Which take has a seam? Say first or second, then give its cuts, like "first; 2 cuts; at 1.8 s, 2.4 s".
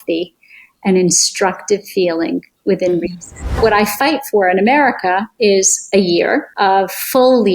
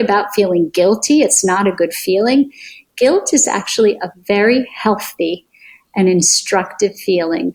first; 2 cuts; at 3.6 s, 6.5 s